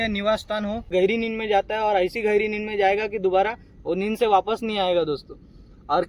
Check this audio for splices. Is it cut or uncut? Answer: cut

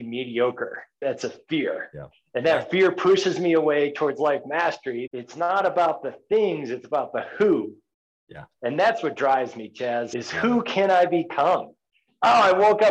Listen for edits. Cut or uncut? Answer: cut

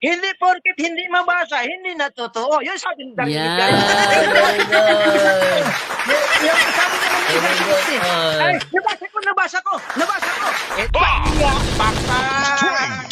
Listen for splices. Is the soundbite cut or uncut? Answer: cut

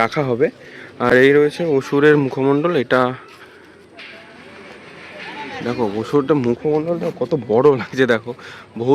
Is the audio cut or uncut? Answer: uncut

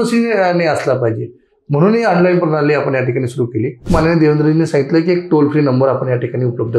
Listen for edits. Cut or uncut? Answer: cut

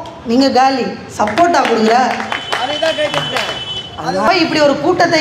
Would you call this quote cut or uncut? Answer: cut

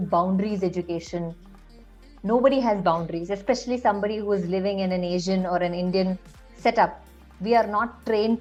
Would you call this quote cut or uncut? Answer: uncut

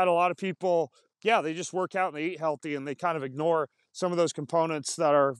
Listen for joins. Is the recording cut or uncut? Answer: cut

